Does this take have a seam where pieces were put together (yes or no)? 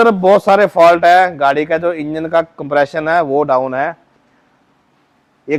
no